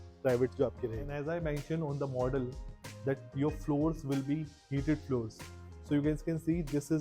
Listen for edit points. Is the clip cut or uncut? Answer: cut